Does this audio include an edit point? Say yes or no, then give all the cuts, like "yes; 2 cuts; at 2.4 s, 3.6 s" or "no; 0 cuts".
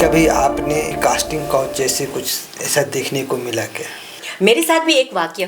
yes; 2 cuts; at 0.9 s, 4.2 s